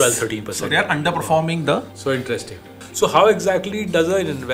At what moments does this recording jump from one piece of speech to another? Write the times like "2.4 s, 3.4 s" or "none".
2.7 s

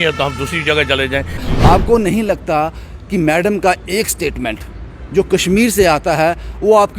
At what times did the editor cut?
1.4 s

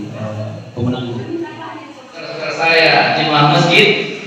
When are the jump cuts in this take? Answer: 2.6 s

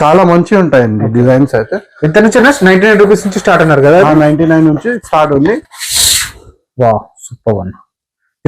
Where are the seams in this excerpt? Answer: 5.6 s

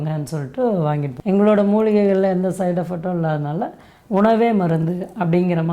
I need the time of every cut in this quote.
1.1 s

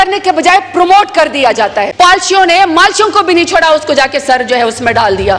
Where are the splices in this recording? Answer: 1.9 s

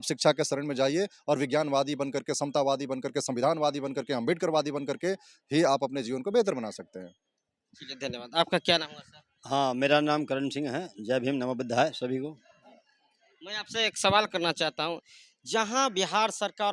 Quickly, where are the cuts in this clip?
none

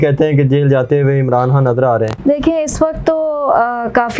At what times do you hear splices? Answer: 2.2 s

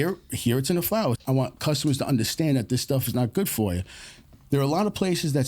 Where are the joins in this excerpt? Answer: 1.2 s

